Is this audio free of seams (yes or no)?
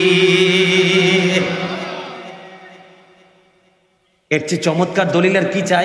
yes